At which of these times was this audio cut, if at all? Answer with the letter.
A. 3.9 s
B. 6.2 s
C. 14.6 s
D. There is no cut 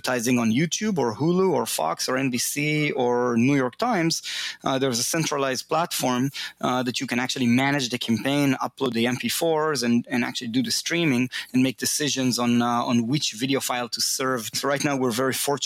C